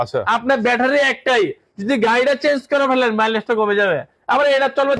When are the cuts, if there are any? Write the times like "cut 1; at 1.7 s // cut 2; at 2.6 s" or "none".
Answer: none